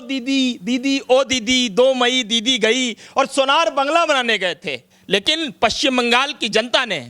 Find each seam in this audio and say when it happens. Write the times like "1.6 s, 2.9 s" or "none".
4.9 s